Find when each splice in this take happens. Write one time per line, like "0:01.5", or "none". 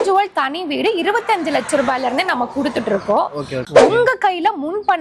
0:03.7